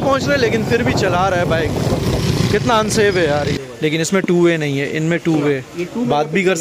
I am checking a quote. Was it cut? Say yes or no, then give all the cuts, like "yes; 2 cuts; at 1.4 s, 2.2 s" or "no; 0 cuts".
yes; 1 cut; at 3.6 s